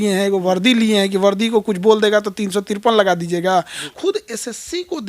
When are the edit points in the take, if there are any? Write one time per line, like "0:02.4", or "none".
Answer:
0:03.8